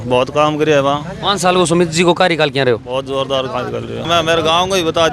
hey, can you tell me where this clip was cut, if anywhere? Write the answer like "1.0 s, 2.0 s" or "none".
4.1 s